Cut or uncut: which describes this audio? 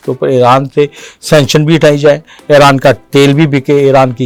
uncut